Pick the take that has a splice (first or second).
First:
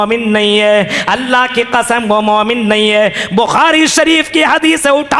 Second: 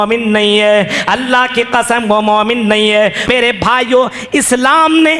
second